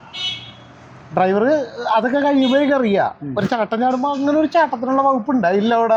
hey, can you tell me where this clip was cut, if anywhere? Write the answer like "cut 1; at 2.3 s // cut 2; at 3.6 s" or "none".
none